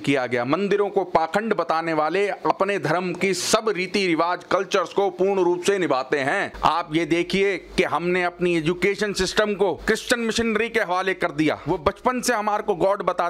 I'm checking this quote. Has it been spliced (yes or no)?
yes